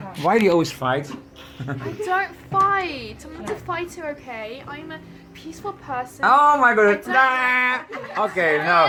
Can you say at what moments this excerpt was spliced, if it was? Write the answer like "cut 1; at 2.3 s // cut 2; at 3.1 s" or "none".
none